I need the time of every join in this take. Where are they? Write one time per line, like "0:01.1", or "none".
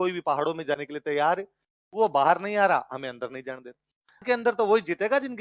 0:04.2

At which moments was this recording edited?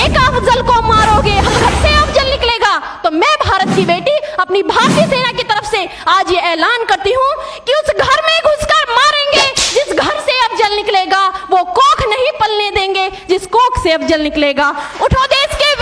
0:01.6

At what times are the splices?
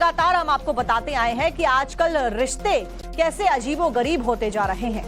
0:02.3

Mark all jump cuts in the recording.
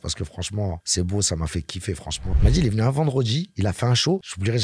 0:02.3

